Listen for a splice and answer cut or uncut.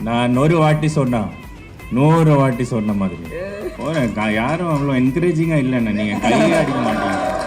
cut